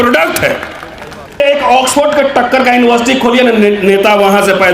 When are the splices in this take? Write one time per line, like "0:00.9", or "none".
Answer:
0:01.4